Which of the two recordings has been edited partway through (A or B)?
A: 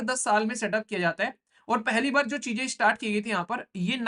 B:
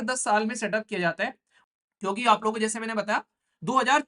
B